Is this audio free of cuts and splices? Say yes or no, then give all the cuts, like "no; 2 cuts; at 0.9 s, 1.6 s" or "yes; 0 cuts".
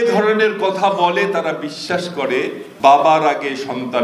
no; 1 cut; at 2.6 s